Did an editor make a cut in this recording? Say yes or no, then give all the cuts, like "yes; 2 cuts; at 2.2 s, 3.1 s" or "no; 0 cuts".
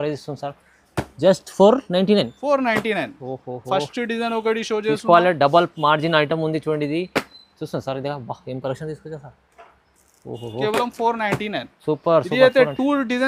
no; 0 cuts